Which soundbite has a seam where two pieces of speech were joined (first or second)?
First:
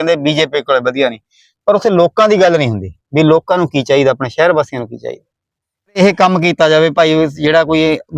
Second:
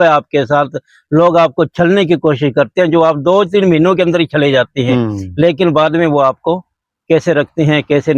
first